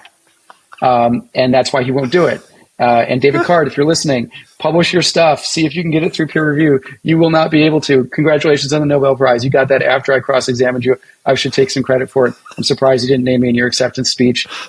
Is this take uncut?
yes; 0 cuts

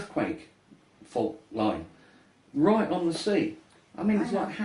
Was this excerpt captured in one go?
no; 1 cut; at 1.2 s

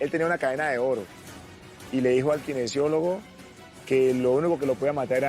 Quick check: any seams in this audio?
no; 0 cuts

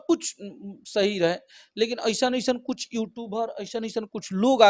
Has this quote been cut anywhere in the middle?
no; 0 cuts

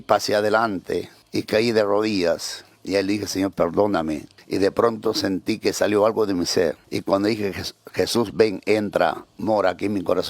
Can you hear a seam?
yes; 3 cuts; at 1.2 s, 4.3 s, 6.8 s

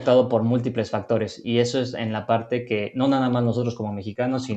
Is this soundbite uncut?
yes; 0 cuts

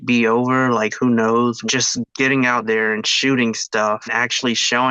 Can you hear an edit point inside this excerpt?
no; 0 cuts

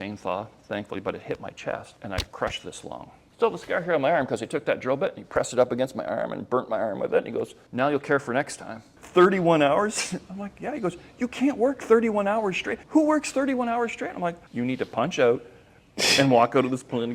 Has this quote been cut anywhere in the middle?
yes; 6 cuts; at 1.9 s, 3.2 s, 7.6 s, 8.9 s, 12.8 s, 14.4 s

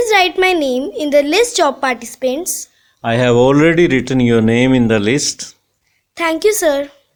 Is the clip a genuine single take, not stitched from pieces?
yes; 0 cuts

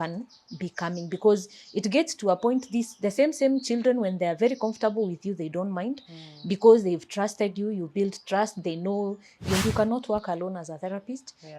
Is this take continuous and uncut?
no; 1 cut; at 9.6 s

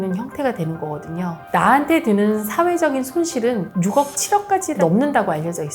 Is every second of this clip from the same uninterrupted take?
no; 1 cut; at 1.4 s

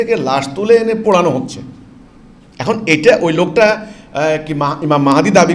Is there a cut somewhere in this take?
no; 0 cuts

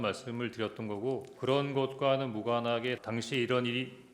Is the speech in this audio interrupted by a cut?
yes; 2 cuts; at 1.3 s, 3.0 s

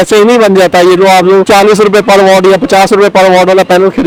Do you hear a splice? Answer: no; 0 cuts

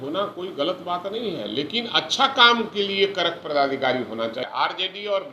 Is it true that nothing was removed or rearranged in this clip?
no; 1 cut; at 4.4 s

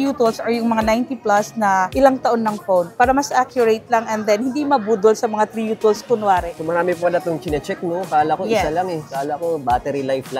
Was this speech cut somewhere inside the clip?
no; 0 cuts

